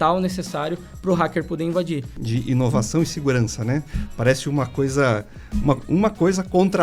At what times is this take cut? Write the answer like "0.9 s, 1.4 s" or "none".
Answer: 2.1 s